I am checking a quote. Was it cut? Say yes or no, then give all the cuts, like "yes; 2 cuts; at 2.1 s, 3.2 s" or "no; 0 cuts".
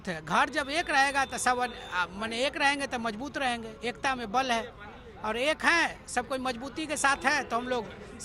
no; 0 cuts